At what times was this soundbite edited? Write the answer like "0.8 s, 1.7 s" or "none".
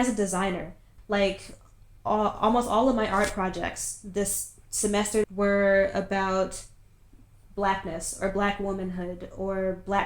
0.9 s, 5.2 s